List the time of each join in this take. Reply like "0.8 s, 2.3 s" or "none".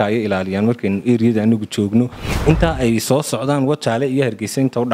2.2 s